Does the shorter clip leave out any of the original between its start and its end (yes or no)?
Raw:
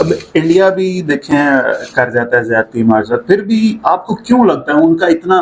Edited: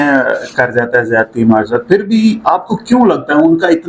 no